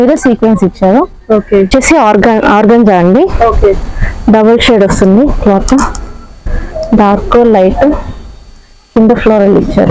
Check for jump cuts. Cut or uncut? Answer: cut